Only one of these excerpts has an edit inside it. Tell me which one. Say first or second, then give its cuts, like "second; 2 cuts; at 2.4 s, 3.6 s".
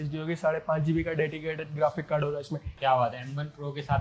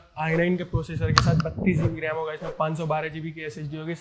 first; 1 cut; at 2.6 s